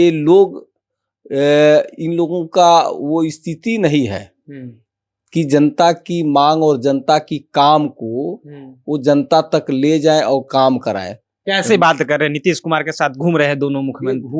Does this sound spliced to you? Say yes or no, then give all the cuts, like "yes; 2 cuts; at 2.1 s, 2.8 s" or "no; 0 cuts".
no; 0 cuts